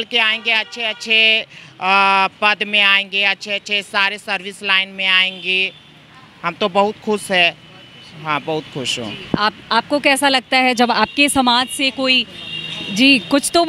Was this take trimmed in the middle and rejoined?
no; 0 cuts

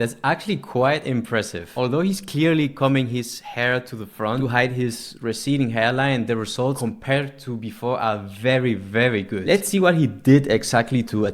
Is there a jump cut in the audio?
yes; 4 cuts; at 1.6 s, 4.4 s, 6.8 s, 9.4 s

